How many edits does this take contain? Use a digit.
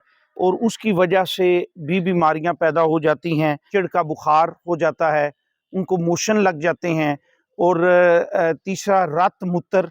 1